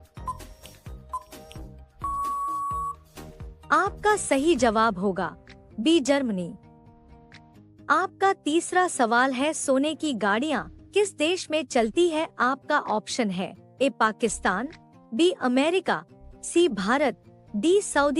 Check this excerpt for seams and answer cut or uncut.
cut